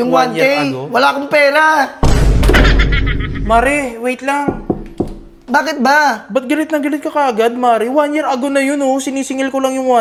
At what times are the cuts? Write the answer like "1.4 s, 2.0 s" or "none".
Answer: none